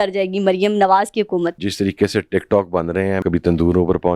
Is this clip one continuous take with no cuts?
no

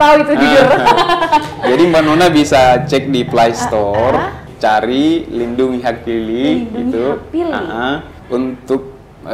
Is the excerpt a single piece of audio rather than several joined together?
no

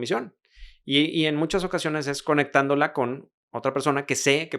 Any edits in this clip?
no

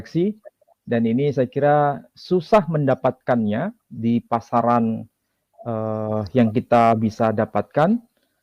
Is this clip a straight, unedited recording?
yes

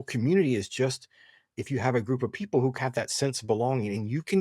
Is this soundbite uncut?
no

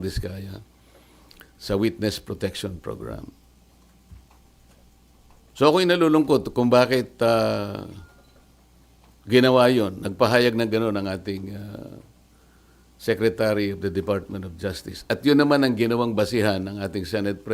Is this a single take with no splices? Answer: yes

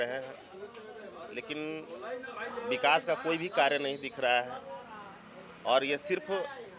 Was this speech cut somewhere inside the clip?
no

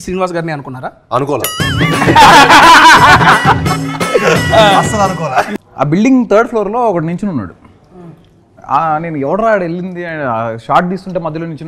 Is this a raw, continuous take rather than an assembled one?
no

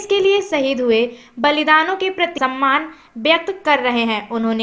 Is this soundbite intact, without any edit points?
no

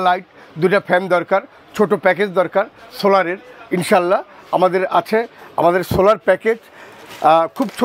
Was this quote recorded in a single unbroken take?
yes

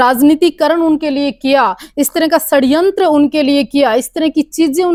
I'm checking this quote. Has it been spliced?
no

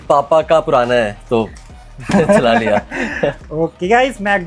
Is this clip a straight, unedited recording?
yes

